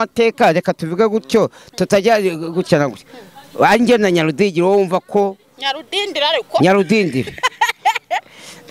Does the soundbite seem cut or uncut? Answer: uncut